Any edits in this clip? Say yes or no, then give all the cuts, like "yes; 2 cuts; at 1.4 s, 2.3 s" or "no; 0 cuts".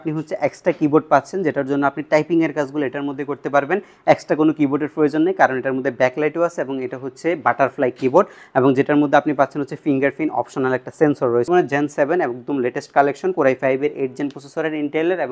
yes; 1 cut; at 11.5 s